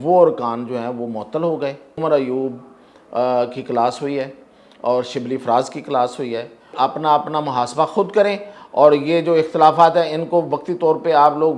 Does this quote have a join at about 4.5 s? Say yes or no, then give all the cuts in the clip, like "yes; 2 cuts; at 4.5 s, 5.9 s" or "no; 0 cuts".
no; 2 cuts; at 2.0 s, 6.7 s